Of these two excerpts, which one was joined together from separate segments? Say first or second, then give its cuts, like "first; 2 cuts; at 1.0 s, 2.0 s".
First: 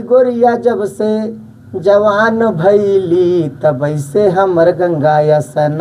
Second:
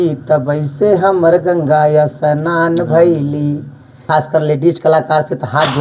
second; 1 cut; at 4.0 s